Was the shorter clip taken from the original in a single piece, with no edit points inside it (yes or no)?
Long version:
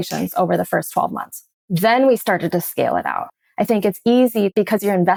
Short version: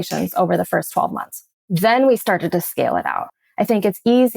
yes